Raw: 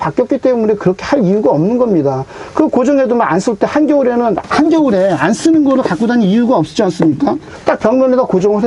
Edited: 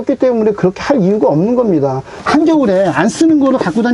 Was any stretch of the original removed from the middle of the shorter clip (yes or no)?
yes